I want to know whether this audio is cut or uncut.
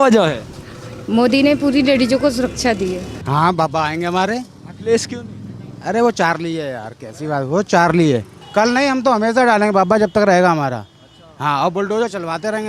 cut